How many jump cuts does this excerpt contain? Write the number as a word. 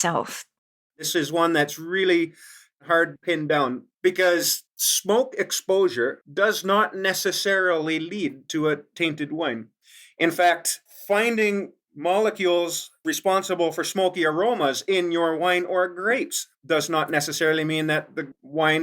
two